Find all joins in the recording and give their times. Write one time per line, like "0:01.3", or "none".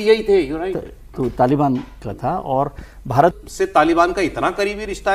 0:03.4